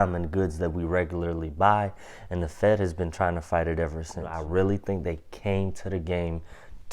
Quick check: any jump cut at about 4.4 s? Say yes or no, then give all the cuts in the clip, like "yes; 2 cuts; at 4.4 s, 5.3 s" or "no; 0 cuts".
yes; 1 cut; at 4.4 s